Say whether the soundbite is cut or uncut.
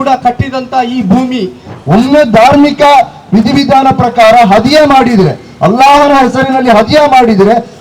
cut